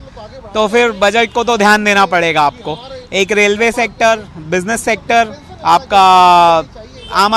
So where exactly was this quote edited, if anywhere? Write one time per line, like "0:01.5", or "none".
none